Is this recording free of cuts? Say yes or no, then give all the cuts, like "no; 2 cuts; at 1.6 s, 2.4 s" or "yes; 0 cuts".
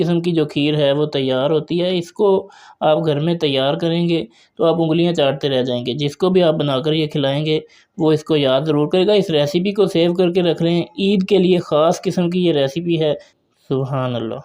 no; 1 cut; at 13.3 s